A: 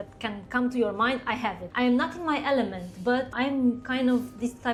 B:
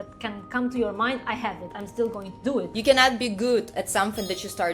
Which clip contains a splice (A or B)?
B